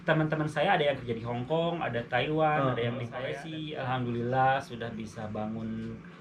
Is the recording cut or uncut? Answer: cut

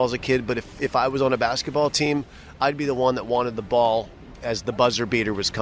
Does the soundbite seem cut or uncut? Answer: uncut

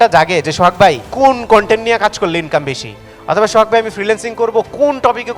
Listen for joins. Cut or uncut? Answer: cut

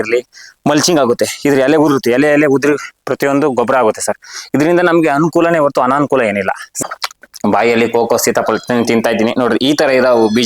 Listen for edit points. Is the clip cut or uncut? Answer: cut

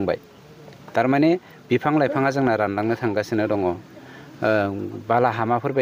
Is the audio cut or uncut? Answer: uncut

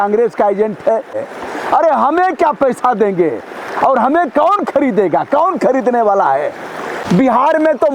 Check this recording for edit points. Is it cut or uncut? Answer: cut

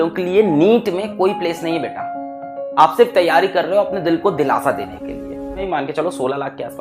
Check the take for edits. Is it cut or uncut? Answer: cut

